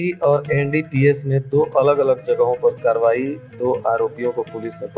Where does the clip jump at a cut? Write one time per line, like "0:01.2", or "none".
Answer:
none